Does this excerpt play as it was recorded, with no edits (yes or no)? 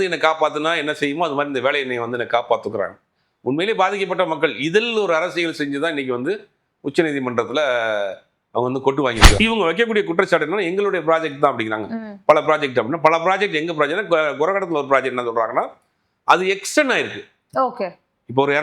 no